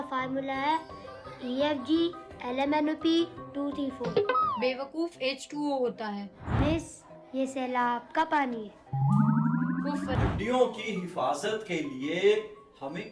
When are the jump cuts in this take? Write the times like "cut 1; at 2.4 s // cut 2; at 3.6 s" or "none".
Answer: cut 1; at 6.4 s // cut 2; at 10.2 s